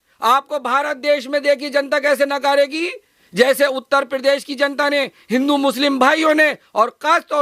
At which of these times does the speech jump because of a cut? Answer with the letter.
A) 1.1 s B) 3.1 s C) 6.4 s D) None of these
D